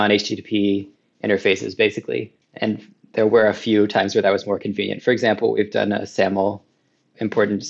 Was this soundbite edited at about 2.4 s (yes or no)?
no